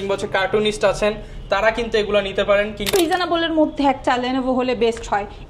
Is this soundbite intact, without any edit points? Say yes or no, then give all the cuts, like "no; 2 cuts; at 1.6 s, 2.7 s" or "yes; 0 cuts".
no; 1 cut; at 2.9 s